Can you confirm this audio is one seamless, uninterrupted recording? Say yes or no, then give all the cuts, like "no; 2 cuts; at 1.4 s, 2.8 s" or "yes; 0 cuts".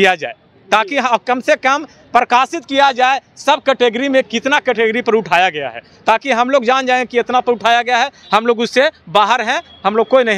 yes; 0 cuts